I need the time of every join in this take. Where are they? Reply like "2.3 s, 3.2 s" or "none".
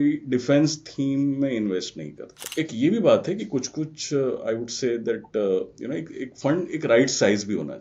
2.4 s